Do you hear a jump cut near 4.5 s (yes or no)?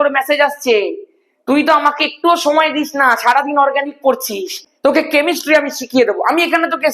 yes